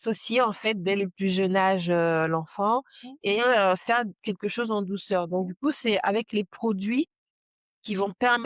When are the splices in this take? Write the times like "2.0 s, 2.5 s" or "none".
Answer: none